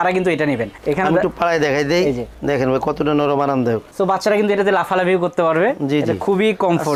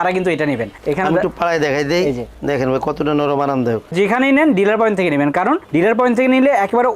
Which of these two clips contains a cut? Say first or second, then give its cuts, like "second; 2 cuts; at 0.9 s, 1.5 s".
second; 1 cut; at 3.9 s